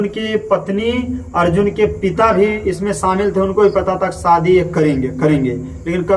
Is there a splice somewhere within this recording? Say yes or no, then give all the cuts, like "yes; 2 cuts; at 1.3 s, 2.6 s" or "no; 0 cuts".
no; 0 cuts